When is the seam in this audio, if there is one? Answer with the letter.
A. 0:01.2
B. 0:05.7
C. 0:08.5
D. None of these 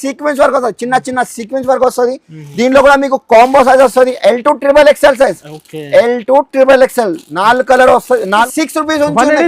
C